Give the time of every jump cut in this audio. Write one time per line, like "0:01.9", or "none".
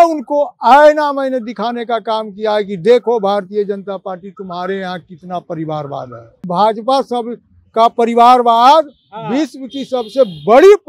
0:06.5